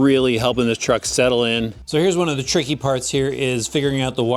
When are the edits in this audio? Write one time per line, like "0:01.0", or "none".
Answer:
0:01.8